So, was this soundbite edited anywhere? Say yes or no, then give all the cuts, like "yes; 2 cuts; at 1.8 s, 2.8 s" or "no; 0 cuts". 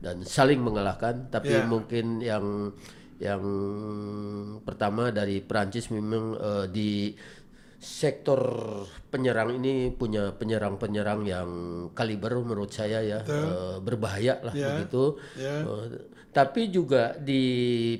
no; 0 cuts